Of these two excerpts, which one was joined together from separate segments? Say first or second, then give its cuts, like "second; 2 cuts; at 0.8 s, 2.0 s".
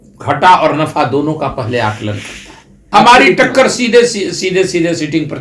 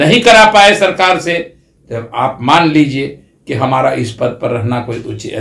first; 1 cut; at 2.7 s